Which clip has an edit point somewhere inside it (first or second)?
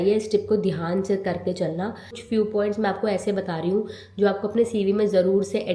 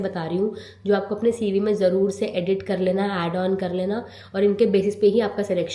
first